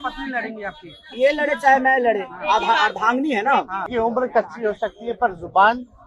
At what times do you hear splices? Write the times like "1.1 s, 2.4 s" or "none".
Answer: 3.8 s